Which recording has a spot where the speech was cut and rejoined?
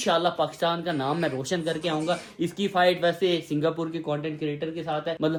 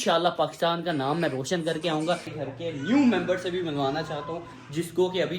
second; 1 cut; at 2.3 s

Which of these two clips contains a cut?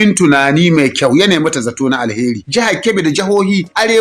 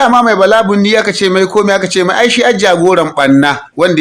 first; 1 cut; at 2.4 s

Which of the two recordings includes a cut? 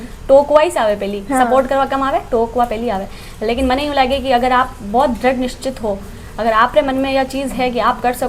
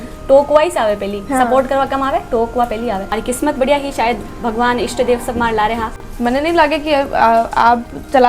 second; 2 cuts; at 3.1 s, 6.0 s

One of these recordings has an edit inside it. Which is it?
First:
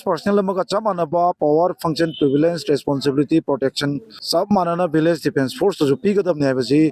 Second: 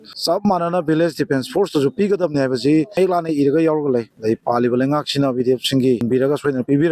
second; 1 cut; at 4.1 s

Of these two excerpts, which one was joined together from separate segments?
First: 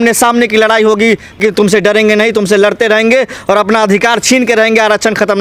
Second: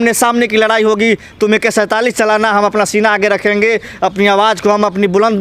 first; 1 cut; at 1.4 s

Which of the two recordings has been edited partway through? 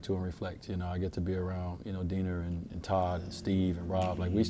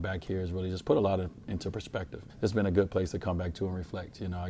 second; 1 cut; at 2.2 s

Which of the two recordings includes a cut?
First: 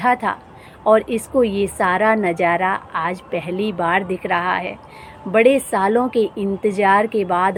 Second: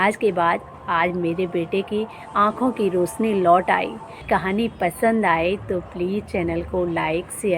second; 1 cut; at 4.2 s

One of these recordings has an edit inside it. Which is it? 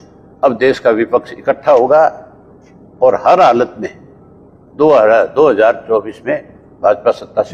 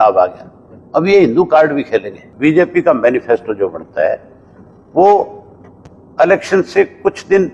second; 1 cut; at 2.2 s

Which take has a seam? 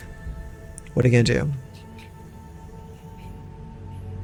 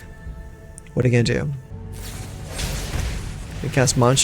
second; 1 cut; at 1.7 s

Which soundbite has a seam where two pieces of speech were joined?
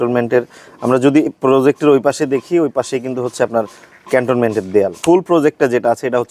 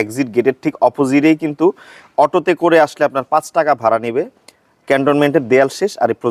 first; 1 cut; at 5.0 s

